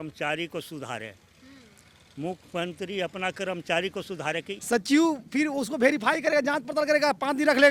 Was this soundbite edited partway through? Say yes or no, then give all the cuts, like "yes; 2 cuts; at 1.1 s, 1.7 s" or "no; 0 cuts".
yes; 1 cut; at 4.5 s